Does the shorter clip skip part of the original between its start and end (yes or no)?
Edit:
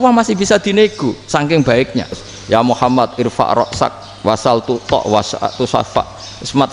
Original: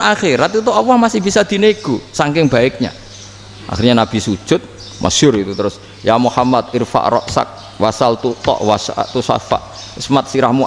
yes